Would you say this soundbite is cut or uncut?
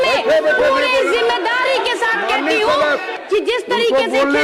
cut